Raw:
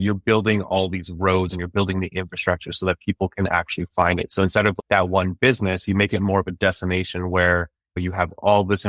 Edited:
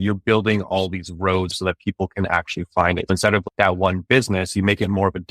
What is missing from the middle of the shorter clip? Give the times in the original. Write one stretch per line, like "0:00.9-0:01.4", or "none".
0:01.5-0:02.7
0:04.3-0:04.4